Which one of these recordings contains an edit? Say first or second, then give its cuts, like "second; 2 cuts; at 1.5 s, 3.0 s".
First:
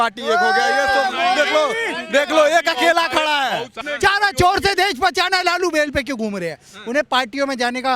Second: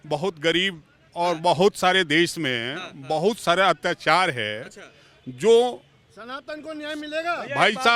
first; 1 cut; at 3.7 s